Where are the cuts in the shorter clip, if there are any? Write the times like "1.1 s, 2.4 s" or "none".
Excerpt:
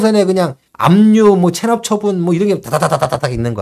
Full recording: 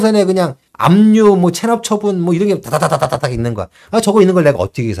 none